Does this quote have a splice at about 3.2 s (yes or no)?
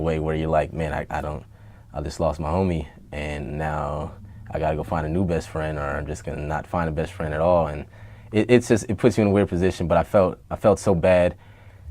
yes